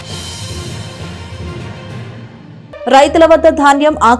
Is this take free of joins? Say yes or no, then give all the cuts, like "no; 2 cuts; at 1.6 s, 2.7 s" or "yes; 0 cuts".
no; 1 cut; at 2.4 s